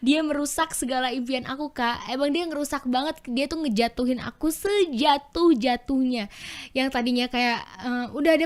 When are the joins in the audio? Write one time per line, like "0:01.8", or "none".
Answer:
none